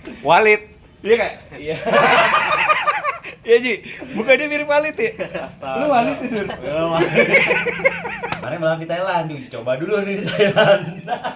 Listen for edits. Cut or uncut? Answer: cut